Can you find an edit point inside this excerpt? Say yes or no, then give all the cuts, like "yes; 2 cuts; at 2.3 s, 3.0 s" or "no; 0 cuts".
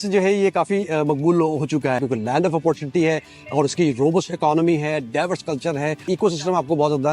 yes; 2 cuts; at 2.0 s, 6.0 s